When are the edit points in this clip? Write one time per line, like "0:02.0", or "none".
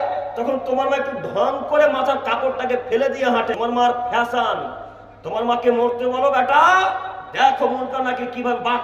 0:03.5